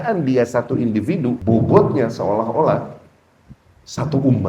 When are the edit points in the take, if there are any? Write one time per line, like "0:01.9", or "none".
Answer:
0:01.4

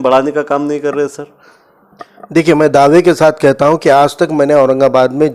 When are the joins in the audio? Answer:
none

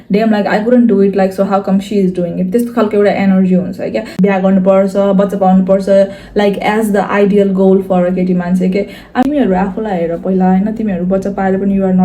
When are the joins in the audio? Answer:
0:04.1
0:09.2

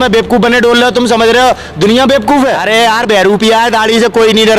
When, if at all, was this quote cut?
0:02.6

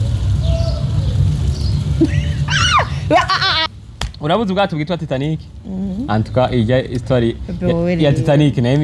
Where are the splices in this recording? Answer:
0:03.6

